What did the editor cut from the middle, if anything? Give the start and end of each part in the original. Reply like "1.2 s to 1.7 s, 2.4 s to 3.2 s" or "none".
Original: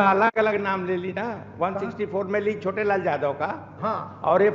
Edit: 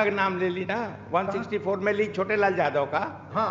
none

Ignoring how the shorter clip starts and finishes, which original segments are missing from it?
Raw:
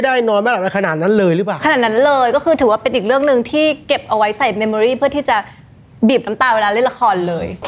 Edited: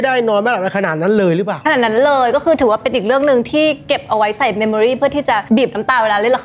5.4 s to 5.9 s

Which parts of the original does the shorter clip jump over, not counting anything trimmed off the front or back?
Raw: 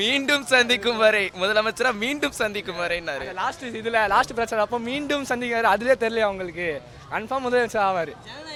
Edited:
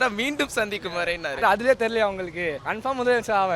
3.2 s to 5.6 s, 6.8 s to 7.1 s

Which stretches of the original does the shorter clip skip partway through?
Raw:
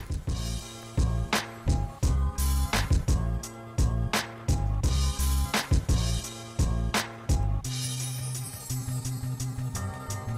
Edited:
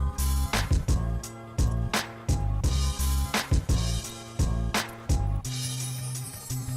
none

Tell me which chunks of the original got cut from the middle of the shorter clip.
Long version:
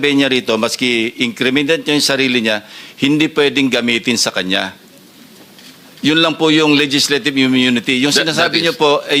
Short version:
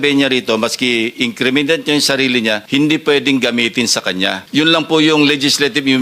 2.6 s to 2.9 s, 4.7 s to 5.9 s

